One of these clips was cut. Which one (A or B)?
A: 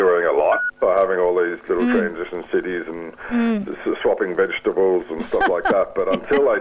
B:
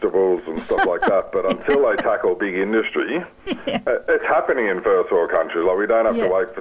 B